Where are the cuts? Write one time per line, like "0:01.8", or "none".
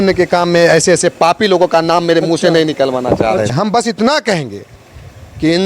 0:03.5